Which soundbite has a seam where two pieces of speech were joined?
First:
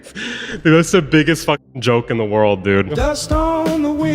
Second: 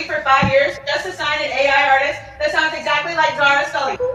first; 1 cut; at 3.0 s

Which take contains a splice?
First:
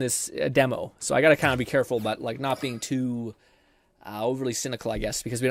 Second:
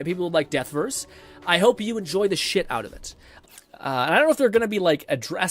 second; 1 cut; at 3.3 s

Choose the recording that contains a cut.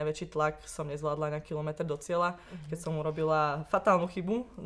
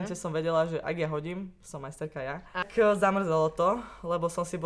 second; 1 cut; at 2.6 s

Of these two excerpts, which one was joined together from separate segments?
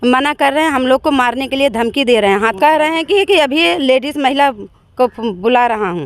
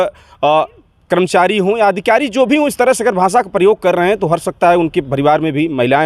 first; 1 cut; at 2.5 s

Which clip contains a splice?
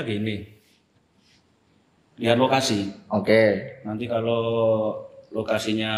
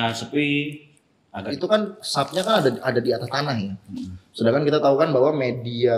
second; 1 cut; at 1.4 s

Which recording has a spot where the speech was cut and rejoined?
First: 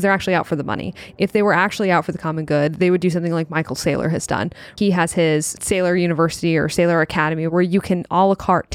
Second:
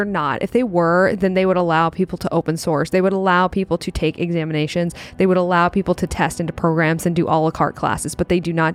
first; 3 cuts; at 4.7 s, 5.6 s, 7.5 s

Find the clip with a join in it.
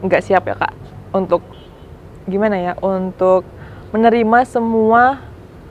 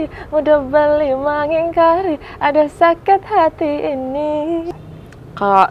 second; 1 cut; at 4.7 s

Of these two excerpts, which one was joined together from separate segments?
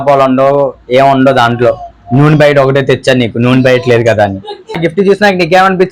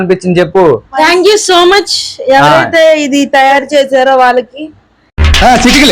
first; 1 cut; at 4.7 s

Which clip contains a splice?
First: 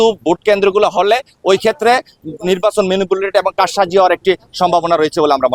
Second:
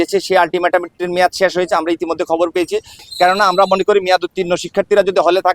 second; 1 cut; at 3.0 s

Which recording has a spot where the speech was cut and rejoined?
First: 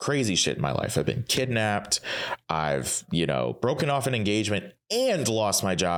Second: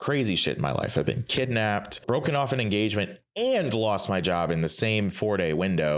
second; 1 cut; at 2.0 s

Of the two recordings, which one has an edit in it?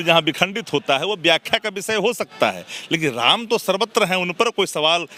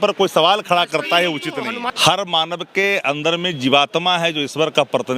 second; 1 cut; at 1.9 s

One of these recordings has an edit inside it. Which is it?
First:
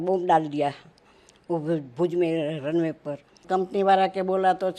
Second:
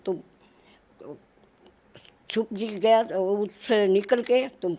first; 1 cut; at 3.4 s

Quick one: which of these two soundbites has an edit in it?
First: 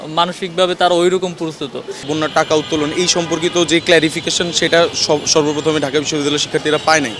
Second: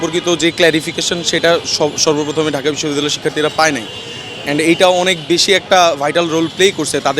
first; 1 cut; at 2.0 s

